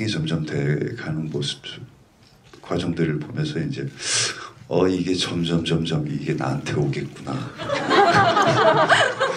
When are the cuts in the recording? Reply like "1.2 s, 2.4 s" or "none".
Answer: none